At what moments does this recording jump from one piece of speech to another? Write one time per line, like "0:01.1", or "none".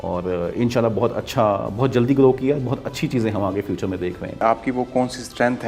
0:04.4